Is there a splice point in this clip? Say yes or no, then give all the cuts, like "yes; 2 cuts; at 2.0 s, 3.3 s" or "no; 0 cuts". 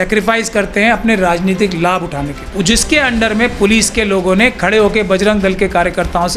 yes; 1 cut; at 2.4 s